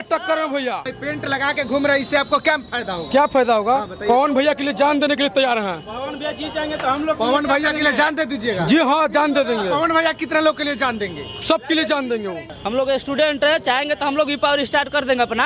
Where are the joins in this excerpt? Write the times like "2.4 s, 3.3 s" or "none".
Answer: 1.0 s, 12.4 s